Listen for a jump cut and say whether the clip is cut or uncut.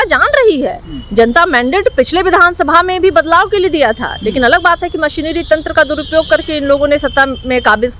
uncut